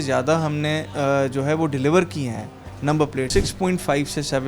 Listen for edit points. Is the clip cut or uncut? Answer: cut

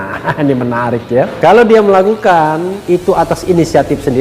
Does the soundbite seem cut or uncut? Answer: cut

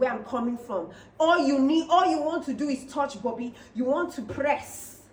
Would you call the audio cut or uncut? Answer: uncut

